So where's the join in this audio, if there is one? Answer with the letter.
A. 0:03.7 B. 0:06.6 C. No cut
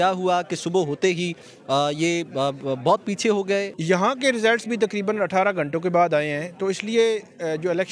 A